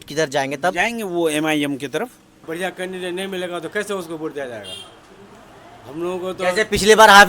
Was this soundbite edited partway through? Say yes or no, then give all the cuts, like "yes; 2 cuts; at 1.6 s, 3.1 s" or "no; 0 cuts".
yes; 1 cut; at 2.4 s